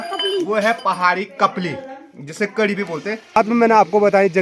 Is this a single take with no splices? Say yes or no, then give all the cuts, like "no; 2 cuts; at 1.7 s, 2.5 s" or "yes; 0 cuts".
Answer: no; 1 cut; at 3.3 s